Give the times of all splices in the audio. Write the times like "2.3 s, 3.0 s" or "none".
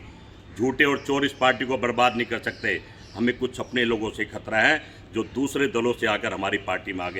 none